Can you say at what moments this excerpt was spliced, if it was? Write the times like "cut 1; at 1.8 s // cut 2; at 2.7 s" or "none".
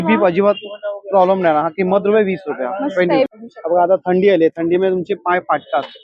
cut 1; at 3.3 s